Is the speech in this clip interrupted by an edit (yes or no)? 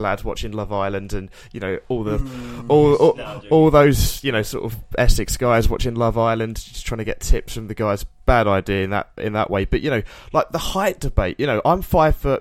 no